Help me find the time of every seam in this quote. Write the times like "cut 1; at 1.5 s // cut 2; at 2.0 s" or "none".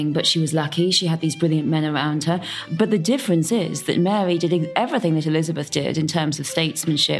cut 1; at 2.7 s